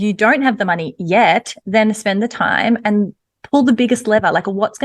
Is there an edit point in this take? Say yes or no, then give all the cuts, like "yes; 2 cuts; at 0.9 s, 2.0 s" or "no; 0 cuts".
no; 0 cuts